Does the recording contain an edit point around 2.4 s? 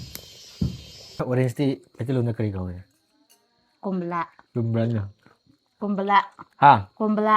no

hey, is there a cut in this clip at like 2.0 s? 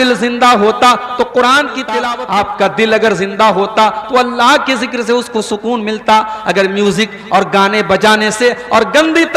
yes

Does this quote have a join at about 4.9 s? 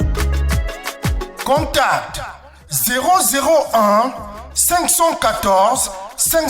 no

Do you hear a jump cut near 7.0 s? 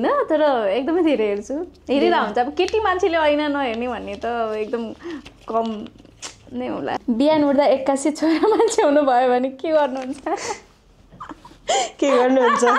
yes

